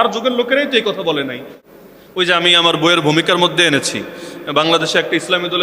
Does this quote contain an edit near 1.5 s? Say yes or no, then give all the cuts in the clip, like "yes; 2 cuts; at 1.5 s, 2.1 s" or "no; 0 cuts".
yes; 1 cut; at 1.5 s